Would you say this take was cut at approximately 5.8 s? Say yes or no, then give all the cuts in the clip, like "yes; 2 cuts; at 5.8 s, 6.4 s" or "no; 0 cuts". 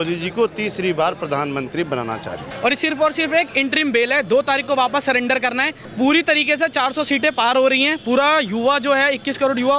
yes; 2 cuts; at 2.4 s, 5.8 s